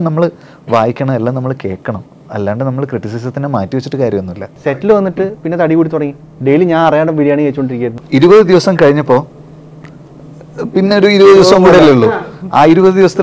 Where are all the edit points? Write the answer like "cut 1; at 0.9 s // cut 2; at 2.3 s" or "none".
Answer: cut 1; at 4.8 s // cut 2; at 8.0 s